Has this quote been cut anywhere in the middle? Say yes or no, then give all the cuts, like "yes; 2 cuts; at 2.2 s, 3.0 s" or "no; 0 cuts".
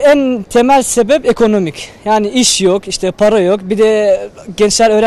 no; 0 cuts